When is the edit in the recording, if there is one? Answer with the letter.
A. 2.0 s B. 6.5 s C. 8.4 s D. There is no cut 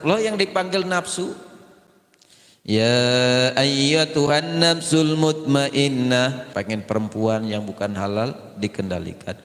B